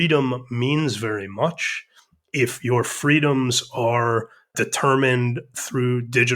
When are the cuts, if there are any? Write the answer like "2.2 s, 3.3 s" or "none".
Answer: 4.5 s